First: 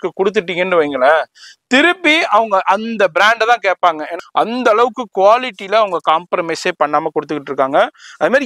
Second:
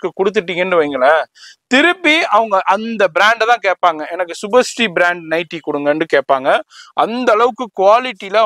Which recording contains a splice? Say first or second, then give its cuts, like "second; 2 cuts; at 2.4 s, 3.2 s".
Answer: first; 1 cut; at 4.2 s